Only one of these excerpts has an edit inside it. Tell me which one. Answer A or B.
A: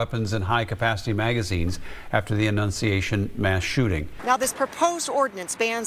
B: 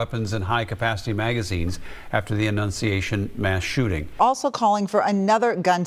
B